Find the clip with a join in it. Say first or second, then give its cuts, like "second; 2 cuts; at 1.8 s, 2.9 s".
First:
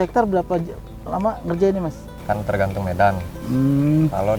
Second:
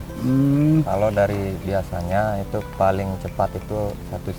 first; 1 cut; at 2.1 s